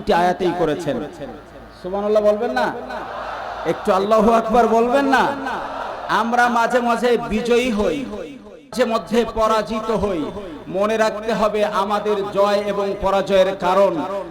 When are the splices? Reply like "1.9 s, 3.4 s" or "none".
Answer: none